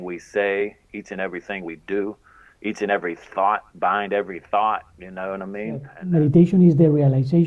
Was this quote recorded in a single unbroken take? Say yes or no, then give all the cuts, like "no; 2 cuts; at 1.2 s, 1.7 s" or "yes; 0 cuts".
no; 1 cut; at 5.9 s